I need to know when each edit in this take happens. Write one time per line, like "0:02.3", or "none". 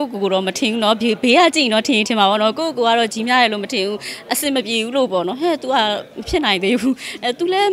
none